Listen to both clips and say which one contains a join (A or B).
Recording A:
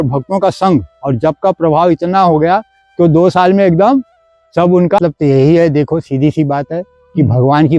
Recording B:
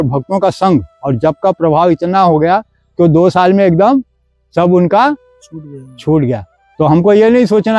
A